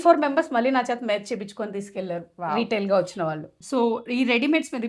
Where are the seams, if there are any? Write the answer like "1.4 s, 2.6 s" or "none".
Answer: 3.5 s